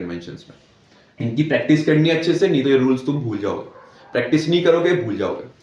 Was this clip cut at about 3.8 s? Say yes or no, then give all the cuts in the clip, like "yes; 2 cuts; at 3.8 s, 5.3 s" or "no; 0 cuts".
no; 1 cut; at 1.2 s